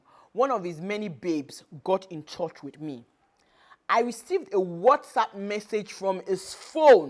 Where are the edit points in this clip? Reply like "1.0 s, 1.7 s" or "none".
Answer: none